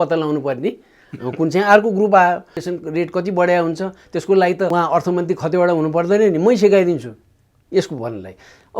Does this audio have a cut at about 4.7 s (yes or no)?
yes